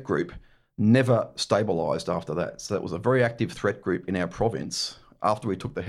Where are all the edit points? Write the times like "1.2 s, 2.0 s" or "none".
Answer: none